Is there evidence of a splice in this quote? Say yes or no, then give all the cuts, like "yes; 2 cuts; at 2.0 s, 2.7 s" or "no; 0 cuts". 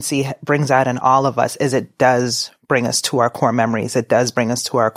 no; 0 cuts